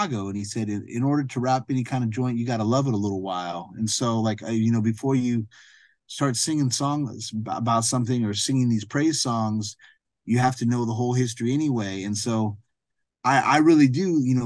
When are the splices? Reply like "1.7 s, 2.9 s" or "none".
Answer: none